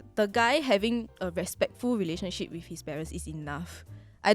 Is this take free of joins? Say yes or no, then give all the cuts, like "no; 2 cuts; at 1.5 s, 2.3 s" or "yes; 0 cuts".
yes; 0 cuts